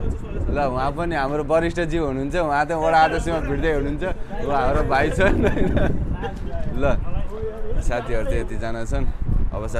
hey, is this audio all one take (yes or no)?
yes